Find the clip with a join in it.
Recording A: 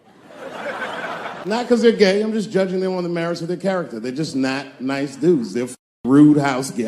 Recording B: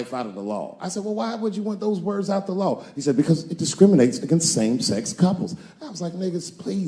A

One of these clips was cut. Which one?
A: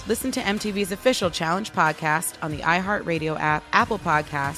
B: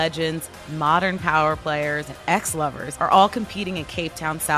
B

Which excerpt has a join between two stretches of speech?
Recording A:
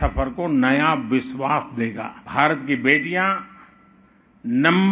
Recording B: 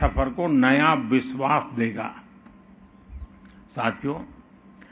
A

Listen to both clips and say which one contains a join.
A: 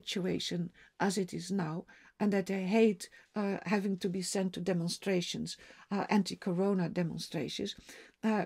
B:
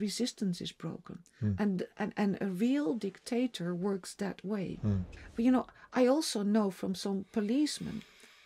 B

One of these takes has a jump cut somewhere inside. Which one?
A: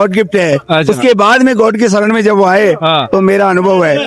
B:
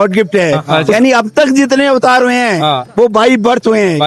B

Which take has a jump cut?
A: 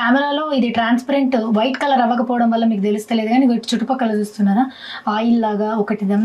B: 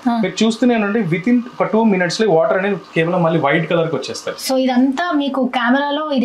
B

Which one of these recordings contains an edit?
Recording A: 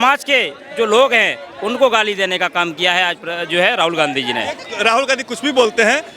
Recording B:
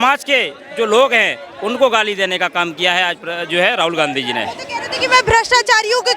A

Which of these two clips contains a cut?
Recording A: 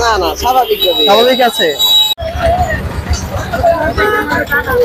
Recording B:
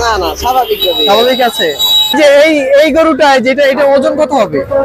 B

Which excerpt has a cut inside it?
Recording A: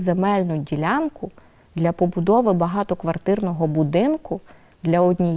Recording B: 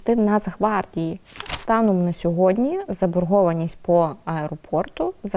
B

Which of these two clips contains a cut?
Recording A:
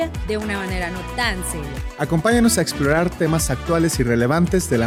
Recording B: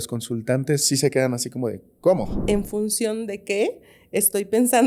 B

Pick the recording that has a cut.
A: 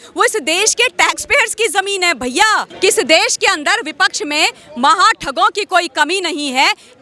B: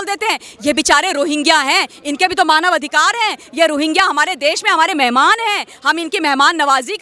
A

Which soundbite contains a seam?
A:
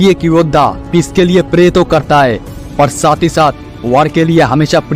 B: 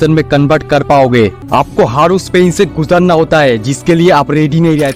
B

